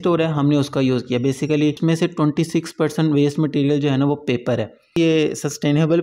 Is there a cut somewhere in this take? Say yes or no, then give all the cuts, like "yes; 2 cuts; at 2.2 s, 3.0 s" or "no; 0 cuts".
yes; 2 cuts; at 1.8 s, 5.0 s